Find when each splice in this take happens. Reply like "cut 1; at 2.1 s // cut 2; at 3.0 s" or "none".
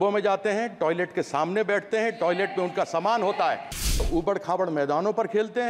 cut 1; at 4.0 s

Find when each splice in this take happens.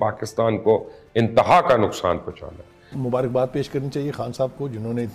cut 1; at 2.9 s

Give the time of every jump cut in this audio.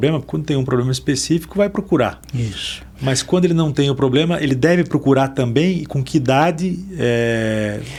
none

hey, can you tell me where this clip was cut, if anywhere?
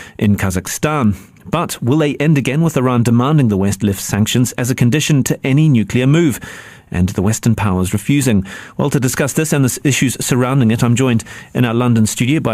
cut 1; at 3.1 s

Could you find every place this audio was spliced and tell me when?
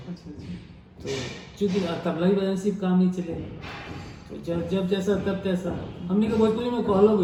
none

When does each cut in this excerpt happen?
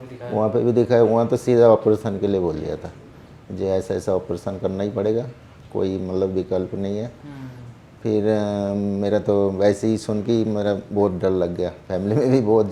none

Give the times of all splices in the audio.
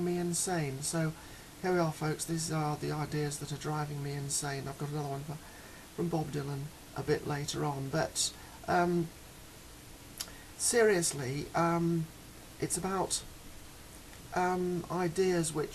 cut 1; at 11.0 s

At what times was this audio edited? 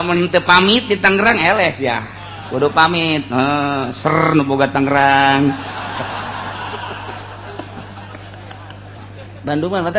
cut 1; at 9.0 s

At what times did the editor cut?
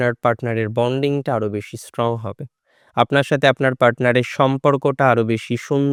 none

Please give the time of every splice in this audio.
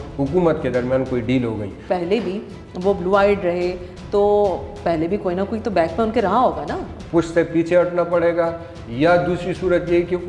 cut 1; at 1.8 s // cut 2; at 6.9 s

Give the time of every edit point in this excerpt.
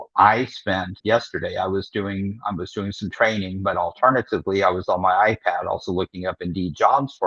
cut 1; at 1.0 s

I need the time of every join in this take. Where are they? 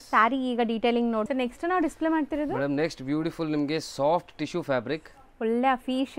cut 1; at 1.3 s

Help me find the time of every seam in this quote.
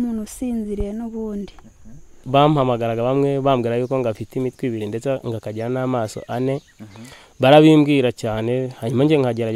cut 1; at 2.2 s

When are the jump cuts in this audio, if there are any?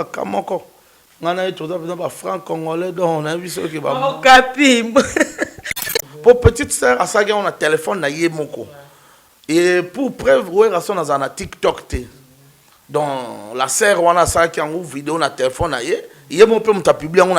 cut 1; at 5.9 s

